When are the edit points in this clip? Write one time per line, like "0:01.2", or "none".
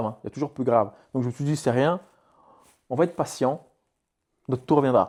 none